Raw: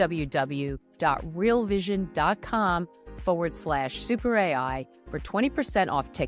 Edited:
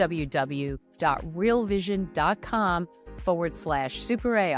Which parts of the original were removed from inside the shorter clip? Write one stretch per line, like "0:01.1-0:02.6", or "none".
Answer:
none